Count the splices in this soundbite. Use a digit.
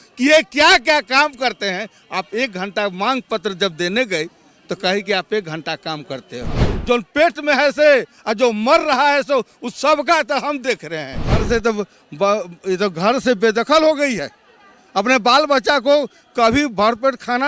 2